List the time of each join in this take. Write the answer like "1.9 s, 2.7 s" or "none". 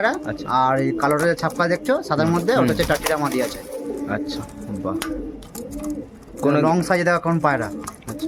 none